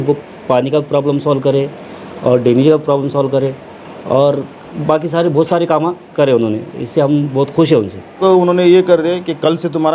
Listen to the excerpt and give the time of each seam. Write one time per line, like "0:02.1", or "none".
0:08.2